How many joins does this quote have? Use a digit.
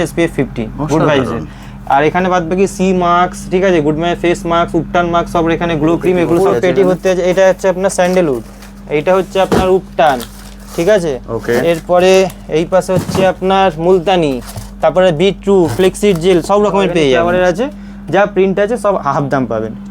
2